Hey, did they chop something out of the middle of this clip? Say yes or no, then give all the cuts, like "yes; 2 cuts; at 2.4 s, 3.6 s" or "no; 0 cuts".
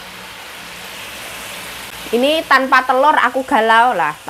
yes; 1 cut; at 2.0 s